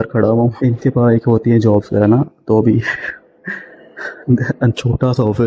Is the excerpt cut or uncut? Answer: uncut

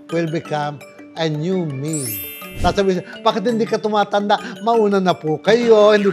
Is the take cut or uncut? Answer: cut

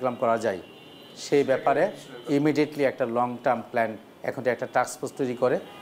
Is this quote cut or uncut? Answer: uncut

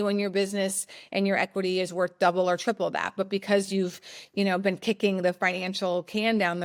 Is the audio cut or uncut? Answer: uncut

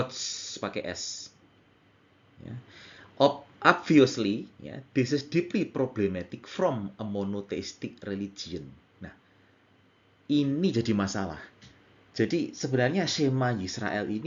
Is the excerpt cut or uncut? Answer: uncut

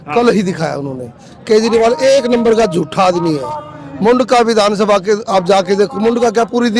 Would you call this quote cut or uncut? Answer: uncut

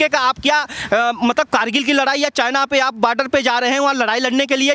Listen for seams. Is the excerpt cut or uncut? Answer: uncut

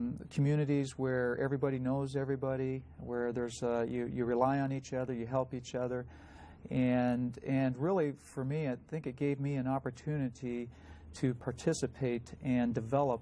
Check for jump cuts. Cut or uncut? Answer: cut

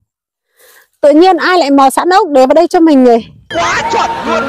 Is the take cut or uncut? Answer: cut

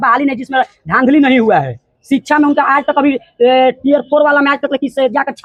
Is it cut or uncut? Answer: uncut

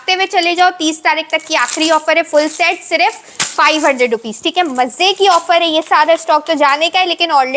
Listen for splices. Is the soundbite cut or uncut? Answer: uncut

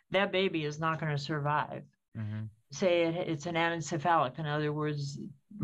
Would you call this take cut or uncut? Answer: uncut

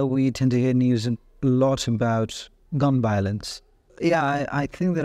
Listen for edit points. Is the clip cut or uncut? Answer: cut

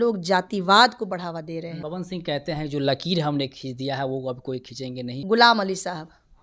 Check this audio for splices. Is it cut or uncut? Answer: cut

